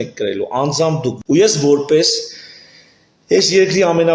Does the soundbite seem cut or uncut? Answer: cut